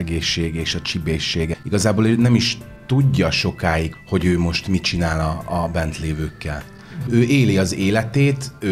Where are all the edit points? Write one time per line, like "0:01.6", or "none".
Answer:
0:01.5
0:03.9

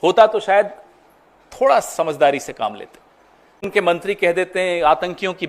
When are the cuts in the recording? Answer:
0:03.8

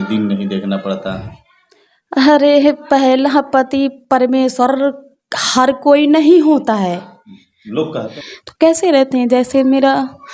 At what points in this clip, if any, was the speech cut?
0:08.1

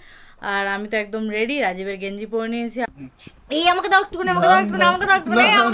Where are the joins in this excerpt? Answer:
0:02.9

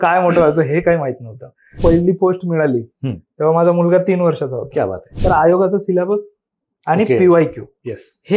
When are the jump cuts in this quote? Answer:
0:01.8
0:05.1

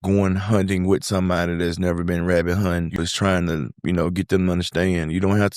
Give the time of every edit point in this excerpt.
0:03.1

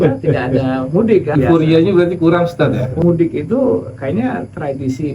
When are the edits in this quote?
0:01.4
0:03.0

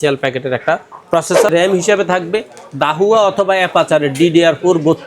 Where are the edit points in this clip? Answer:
0:01.5

